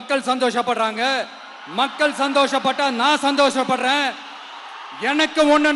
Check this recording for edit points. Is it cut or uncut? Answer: uncut